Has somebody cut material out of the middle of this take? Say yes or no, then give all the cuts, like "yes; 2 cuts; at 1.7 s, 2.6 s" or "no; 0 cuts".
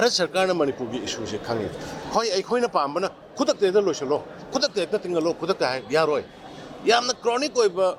no; 0 cuts